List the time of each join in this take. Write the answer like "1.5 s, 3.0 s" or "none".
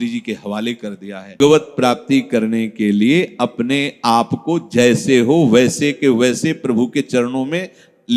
1.4 s